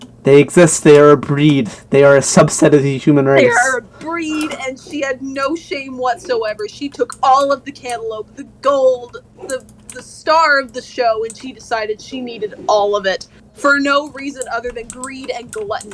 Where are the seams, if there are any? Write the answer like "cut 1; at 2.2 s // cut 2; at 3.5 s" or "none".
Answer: cut 1; at 3.4 s